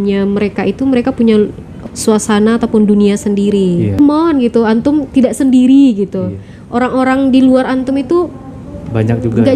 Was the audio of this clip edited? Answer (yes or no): yes